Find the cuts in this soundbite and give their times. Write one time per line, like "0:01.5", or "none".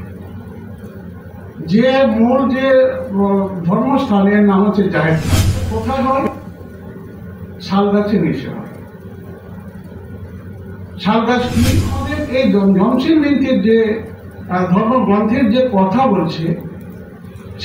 0:05.7
0:12.2